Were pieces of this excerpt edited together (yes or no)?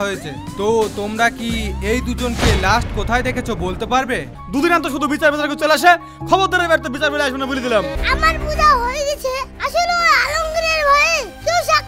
yes